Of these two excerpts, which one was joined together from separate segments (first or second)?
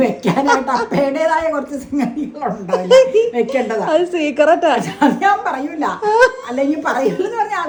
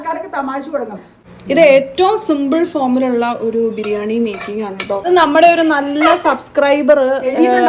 second